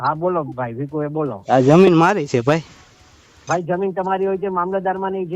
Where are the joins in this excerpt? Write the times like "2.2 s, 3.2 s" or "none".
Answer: 1.4 s